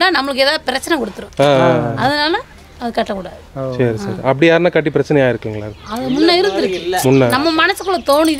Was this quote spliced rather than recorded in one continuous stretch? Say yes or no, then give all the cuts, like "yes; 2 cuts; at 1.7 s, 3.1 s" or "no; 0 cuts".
no; 0 cuts